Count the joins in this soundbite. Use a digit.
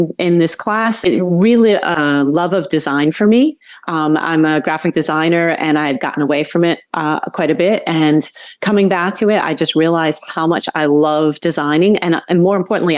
2